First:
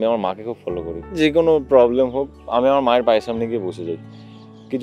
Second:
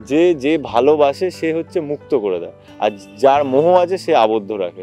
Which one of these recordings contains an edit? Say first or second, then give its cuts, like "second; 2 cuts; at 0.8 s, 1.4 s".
first; 2 cuts; at 1.2 s, 2.4 s